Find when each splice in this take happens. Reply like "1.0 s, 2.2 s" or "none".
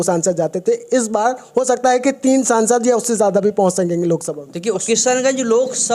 4.8 s